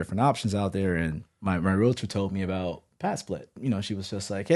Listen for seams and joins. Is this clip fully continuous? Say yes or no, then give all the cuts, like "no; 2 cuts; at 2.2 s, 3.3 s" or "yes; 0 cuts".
no; 1 cut; at 3.6 s